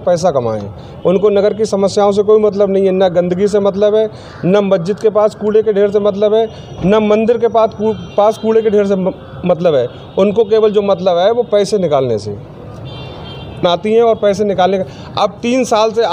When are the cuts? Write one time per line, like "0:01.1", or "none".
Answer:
none